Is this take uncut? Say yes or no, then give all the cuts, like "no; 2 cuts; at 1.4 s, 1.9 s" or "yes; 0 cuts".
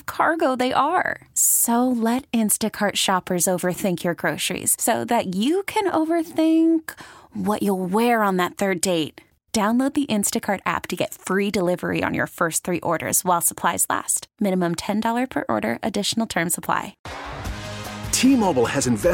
no; 1 cut; at 17.0 s